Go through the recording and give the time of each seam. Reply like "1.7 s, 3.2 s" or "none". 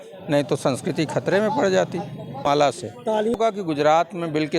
2.5 s, 3.4 s